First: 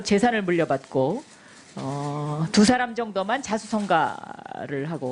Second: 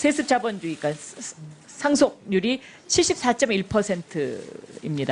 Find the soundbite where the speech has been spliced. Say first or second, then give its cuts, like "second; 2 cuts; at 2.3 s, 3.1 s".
second; 1 cut; at 3.0 s